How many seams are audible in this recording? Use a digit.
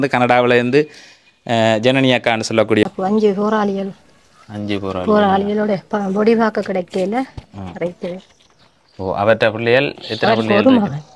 1